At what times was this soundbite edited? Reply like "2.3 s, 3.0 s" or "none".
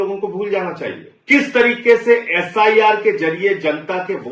1.1 s